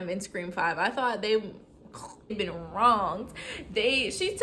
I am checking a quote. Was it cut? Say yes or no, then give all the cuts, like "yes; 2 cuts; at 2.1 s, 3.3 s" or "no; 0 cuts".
yes; 1 cut; at 2.4 s